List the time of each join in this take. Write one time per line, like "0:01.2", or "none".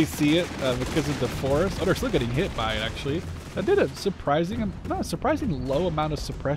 none